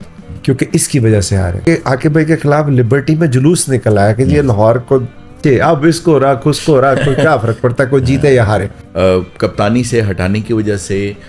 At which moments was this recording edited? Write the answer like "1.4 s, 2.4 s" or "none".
1.6 s, 5.4 s, 8.8 s